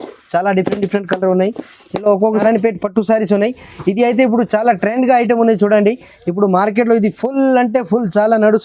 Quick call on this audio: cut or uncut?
cut